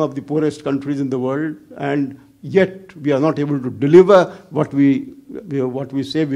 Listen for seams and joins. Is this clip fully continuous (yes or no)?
yes